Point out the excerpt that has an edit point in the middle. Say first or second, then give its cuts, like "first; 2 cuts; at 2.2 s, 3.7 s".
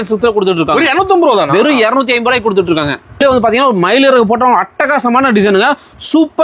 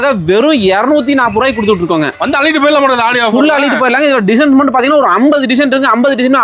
first; 1 cut; at 3.2 s